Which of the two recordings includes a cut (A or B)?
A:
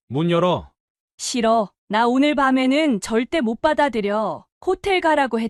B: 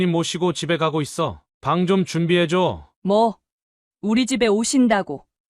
B